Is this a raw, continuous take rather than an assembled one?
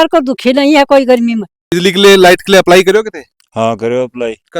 no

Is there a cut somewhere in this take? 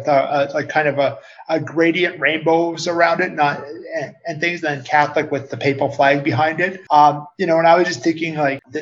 no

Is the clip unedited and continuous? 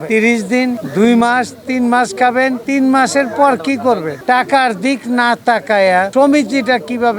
no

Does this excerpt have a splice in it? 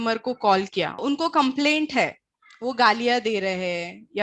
no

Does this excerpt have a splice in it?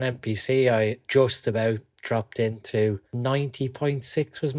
yes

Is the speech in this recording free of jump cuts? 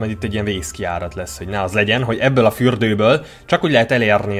yes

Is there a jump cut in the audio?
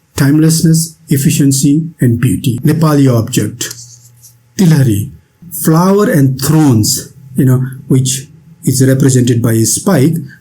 yes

